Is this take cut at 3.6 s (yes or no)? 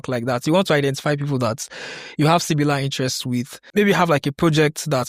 yes